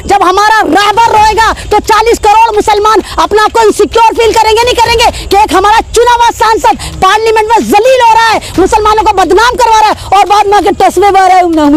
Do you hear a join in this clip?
no; 0 cuts

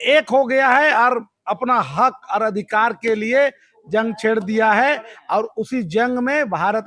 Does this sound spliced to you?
no; 0 cuts

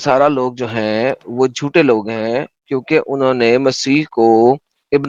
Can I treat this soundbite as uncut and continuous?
yes; 0 cuts

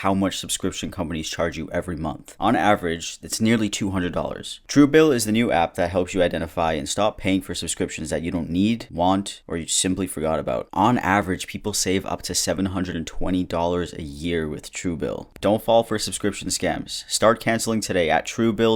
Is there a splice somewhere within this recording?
yes; 1 cut; at 15.2 s

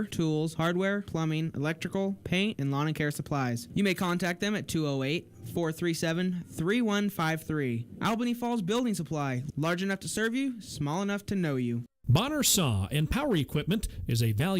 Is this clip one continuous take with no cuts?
no; 1 cut; at 11.9 s

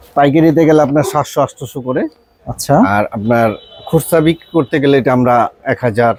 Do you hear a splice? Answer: no; 0 cuts

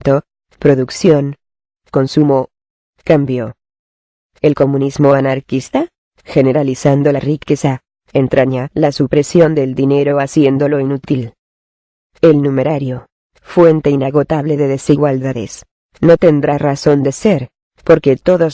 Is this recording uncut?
yes; 0 cuts

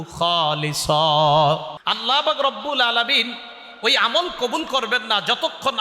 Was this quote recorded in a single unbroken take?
no; 1 cut; at 1.8 s

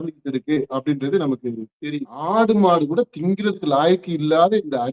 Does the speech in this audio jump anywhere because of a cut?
yes; 1 cut; at 2.2 s

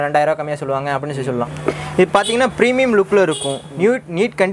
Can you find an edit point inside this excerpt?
yes; 1 cut; at 1.5 s

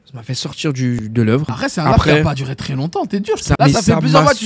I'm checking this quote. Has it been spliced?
yes; 2 cuts; at 1.0 s, 3.5 s

